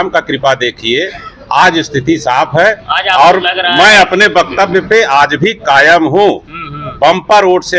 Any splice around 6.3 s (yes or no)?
no